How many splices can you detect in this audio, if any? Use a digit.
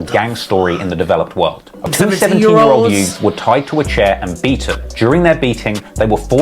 1